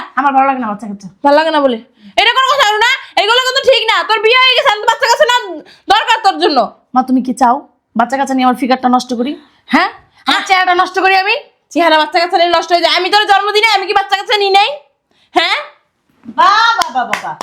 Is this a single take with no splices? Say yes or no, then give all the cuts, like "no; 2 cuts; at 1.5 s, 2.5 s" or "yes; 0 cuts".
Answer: yes; 0 cuts